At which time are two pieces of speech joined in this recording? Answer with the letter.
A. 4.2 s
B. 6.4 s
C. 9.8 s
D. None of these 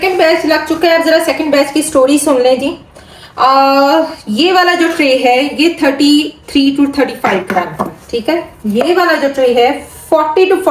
D